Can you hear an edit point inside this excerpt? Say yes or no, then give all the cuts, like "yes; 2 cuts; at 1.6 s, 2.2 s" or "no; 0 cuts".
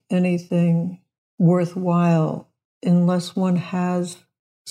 no; 0 cuts